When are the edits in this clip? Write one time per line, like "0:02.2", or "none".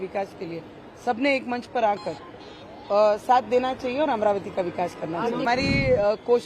0:05.4